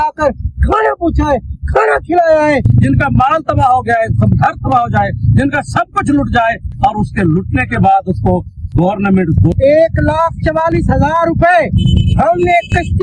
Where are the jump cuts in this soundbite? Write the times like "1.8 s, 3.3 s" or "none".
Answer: 2.7 s, 9.5 s